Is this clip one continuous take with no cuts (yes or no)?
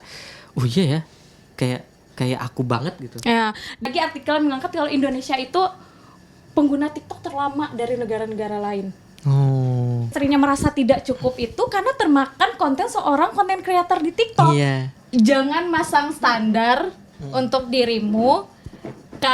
no